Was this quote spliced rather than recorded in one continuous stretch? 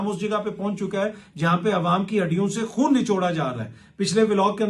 no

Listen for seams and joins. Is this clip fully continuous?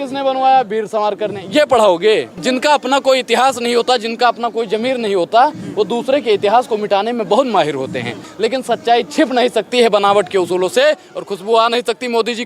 no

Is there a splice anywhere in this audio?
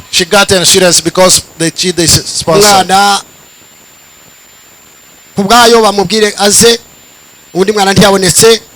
no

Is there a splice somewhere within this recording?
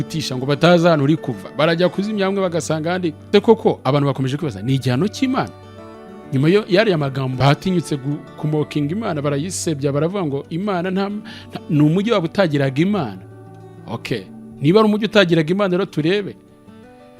yes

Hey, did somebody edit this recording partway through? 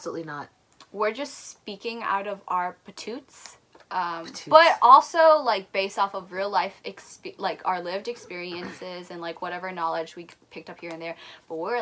no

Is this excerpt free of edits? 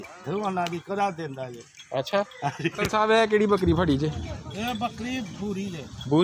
no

